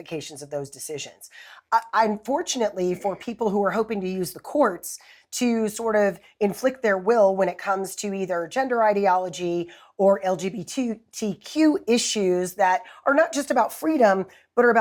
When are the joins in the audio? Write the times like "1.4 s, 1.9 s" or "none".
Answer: none